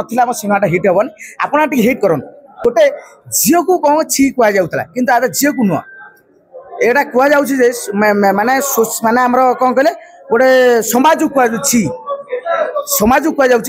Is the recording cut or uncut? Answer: cut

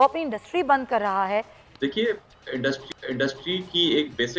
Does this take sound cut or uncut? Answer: cut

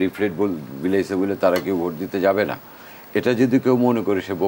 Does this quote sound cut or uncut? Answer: uncut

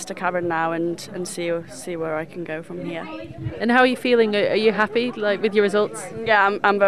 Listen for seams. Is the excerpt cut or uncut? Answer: uncut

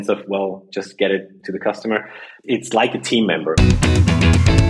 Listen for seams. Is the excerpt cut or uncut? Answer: cut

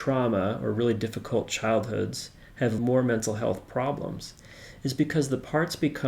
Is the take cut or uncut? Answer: cut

